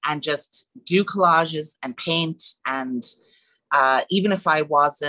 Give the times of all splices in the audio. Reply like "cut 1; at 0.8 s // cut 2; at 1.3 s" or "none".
none